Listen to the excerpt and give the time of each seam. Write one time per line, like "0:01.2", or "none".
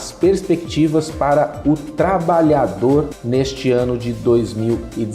0:03.2